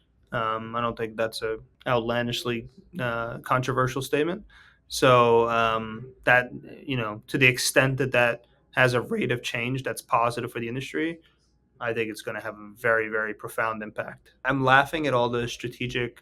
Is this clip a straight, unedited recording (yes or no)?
no